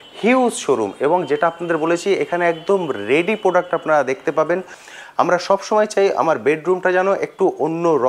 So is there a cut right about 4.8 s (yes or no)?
yes